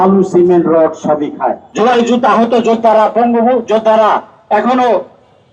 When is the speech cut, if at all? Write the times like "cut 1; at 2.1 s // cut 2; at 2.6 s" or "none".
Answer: cut 1; at 1.6 s